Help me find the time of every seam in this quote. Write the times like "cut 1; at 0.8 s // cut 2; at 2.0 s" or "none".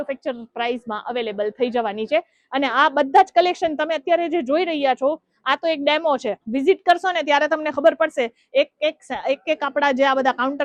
none